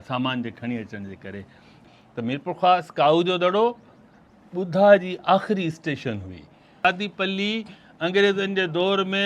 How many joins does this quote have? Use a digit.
2